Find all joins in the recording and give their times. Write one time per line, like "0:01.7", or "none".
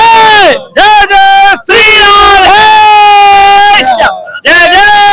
none